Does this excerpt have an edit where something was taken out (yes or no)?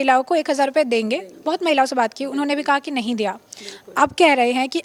no